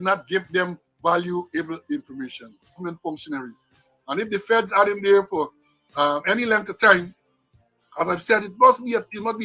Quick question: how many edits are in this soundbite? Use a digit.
1